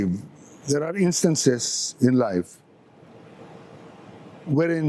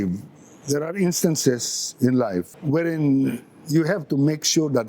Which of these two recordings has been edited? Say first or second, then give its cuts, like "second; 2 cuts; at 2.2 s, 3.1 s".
second; 1 cut; at 2.5 s